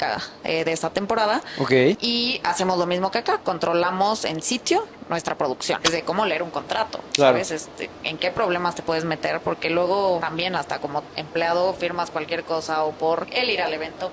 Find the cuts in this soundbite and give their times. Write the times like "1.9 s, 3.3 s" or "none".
2.0 s, 5.8 s, 10.2 s, 13.3 s